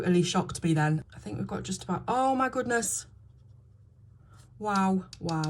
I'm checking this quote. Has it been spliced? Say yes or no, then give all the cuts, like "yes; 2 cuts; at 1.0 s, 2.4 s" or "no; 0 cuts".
yes; 1 cut; at 1.0 s